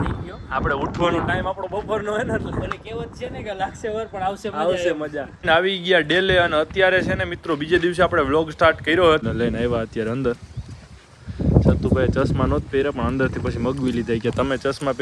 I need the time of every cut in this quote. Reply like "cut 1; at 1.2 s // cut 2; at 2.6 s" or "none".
cut 1; at 5.4 s // cut 2; at 9.2 s